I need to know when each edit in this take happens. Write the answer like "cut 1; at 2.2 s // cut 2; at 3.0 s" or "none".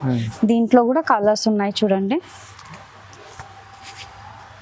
none